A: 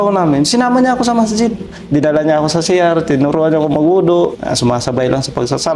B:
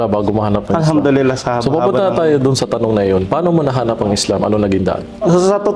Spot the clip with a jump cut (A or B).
A